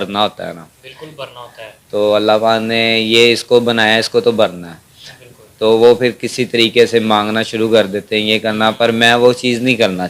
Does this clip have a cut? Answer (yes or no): no